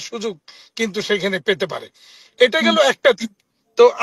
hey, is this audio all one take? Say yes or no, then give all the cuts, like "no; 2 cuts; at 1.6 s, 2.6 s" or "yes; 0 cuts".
yes; 0 cuts